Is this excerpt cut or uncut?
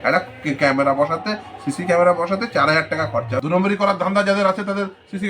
cut